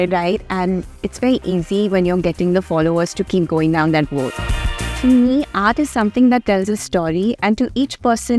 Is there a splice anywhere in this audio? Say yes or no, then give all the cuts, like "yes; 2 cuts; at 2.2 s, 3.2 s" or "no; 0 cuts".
yes; 1 cut; at 4.8 s